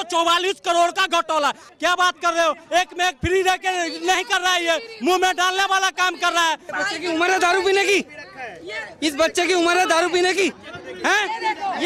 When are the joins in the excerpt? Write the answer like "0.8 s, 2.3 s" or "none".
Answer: 1.6 s, 6.7 s